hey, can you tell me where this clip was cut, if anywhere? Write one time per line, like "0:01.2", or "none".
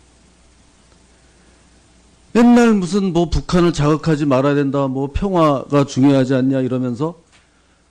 none